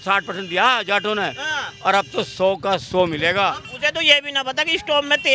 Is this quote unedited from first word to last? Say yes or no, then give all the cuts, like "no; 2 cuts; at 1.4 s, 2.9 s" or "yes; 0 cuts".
no; 1 cut; at 3.7 s